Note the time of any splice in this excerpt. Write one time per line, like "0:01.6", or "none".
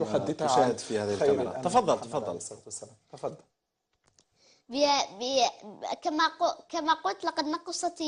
none